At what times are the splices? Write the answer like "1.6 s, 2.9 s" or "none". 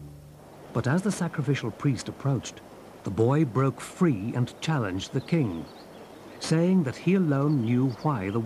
none